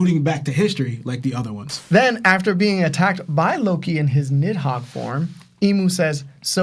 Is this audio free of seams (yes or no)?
no